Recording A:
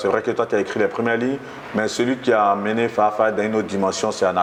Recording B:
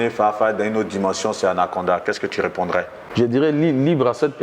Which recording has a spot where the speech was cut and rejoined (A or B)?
B